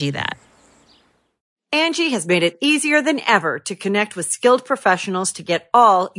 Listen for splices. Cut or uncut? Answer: cut